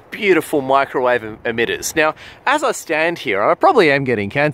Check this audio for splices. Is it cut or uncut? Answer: uncut